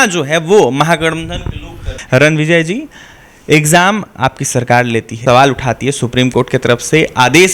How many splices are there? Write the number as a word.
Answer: two